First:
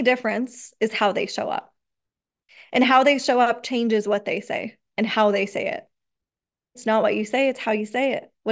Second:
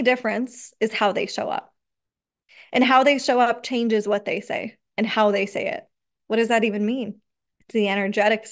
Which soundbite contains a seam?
second; 1 cut; at 6.1 s

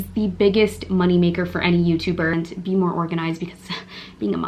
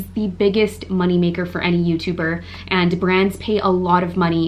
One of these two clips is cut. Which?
first; 1 cut; at 2.4 s

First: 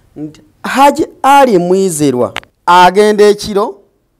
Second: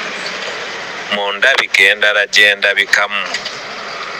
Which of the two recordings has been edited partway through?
first; 1 cut; at 2.5 s

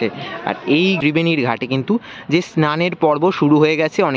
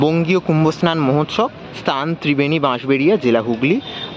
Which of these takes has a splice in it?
first; 1 cut; at 1.0 s

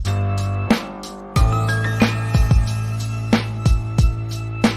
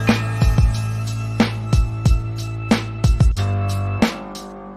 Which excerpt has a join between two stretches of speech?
first; 1 cut; at 1.0 s

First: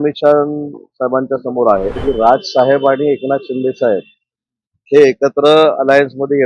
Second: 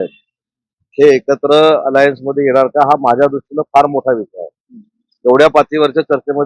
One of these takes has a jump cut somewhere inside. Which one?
first; 1 cut; at 2.0 s

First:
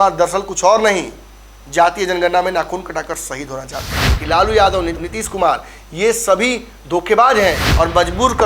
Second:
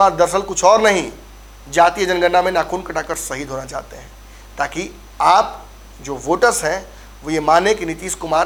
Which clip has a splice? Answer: first; 2 cuts; at 4.1 s, 7.6 s

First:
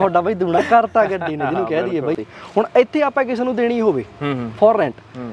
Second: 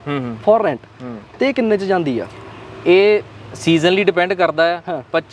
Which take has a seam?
first; 1 cut; at 2.3 s

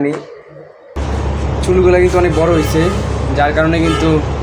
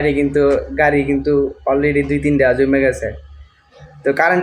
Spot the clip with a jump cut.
first; 1 cut; at 0.9 s

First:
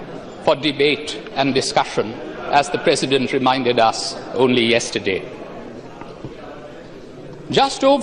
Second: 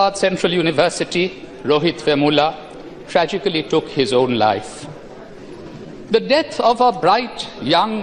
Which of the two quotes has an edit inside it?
first; 1 cut; at 4.1 s

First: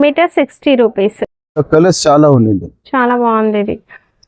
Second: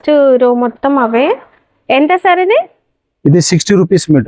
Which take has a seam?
first; 1 cut; at 1.6 s

